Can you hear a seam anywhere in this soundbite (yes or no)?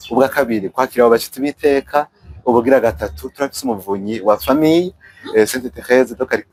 no